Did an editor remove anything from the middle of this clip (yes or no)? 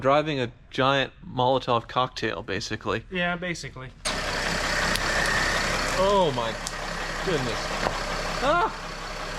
yes